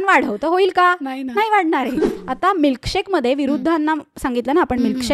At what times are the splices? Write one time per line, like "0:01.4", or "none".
0:02.2